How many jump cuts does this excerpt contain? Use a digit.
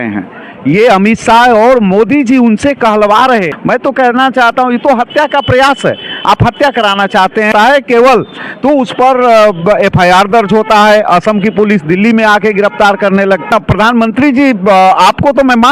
3